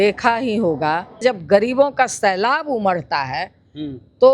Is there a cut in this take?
yes; 1 cut; at 1.2 s

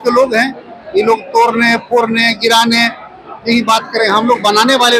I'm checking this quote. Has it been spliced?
no; 0 cuts

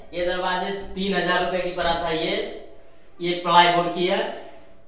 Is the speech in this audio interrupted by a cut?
no; 0 cuts

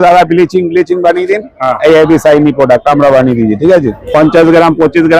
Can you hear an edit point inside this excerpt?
yes; 1 cut; at 4.0 s

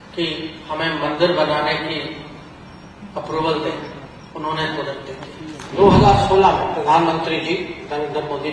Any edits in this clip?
yes; 1 cut; at 5.7 s

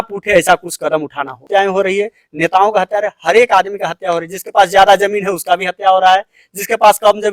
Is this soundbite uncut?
no; 1 cut; at 1.4 s

